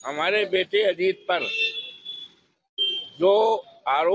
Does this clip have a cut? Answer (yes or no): no